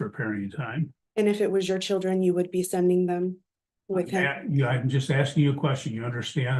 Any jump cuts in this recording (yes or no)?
yes